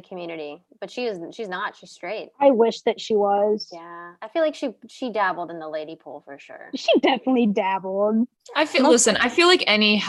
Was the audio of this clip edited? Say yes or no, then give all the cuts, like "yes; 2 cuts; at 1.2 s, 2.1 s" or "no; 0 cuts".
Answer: yes; 1 cut; at 8.4 s